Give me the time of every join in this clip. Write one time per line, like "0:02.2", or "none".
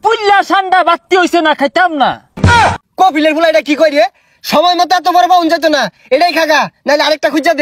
0:02.5